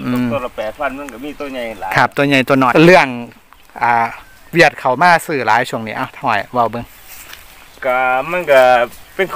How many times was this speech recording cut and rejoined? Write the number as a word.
one